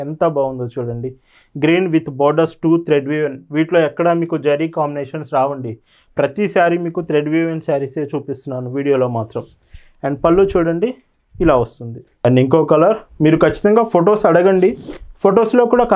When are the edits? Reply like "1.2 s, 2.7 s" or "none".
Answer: none